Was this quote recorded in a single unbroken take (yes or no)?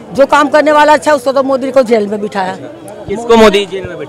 yes